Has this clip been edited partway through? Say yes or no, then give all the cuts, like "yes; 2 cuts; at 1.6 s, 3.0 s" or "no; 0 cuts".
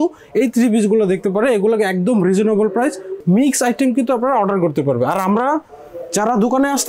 yes; 1 cut; at 3.1 s